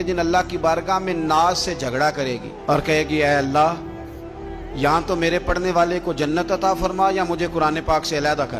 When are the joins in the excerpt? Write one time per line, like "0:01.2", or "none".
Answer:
none

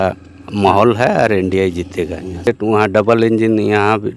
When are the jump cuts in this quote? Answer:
0:02.4

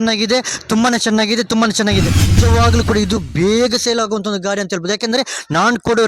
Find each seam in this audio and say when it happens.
0:02.2

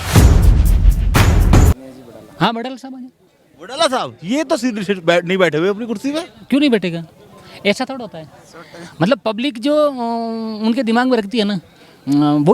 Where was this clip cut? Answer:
0:01.7

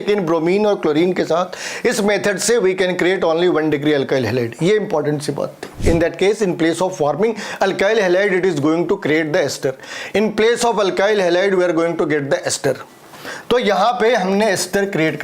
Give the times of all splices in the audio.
0:05.8

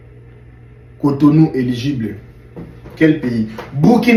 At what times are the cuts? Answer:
none

